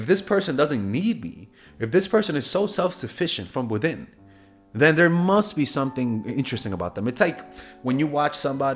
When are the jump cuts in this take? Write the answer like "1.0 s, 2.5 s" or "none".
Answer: none

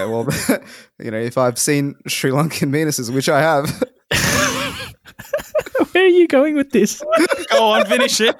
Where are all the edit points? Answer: none

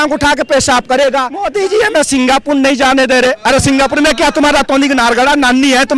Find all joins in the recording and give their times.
1.4 s

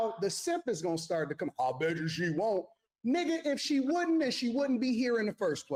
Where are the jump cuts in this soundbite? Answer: none

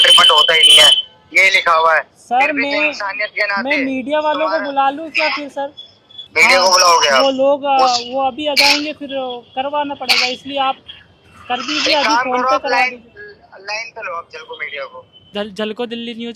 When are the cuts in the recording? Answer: 6.2 s, 15.3 s

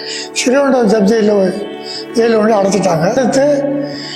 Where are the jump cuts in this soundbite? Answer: 3.2 s

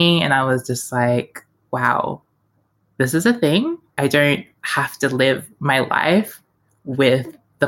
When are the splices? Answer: 1.6 s, 4.0 s

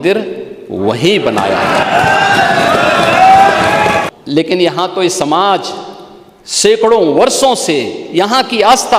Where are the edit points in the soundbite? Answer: 4.1 s

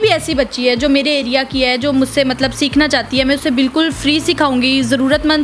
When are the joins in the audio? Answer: none

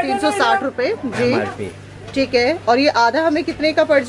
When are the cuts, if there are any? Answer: none

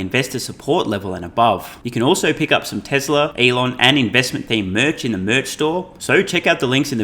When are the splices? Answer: 1.8 s, 3.3 s, 5.9 s

